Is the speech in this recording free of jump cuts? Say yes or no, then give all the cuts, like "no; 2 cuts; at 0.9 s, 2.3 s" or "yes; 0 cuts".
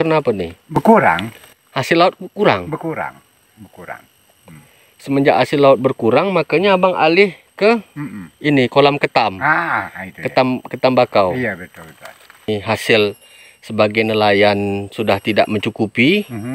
no; 1 cut; at 12.5 s